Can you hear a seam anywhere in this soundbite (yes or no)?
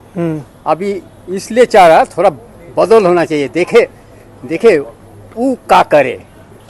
no